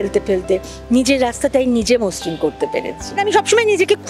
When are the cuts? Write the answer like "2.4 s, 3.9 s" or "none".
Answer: 3.2 s